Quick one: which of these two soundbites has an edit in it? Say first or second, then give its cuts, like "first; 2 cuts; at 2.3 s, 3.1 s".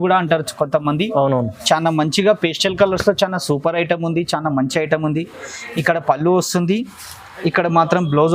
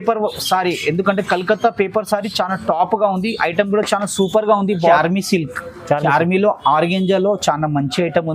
second; 1 cut; at 4.8 s